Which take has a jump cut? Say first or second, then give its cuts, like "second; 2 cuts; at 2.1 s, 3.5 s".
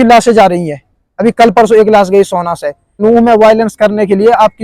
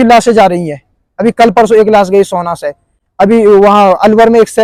first; 1 cut; at 3.0 s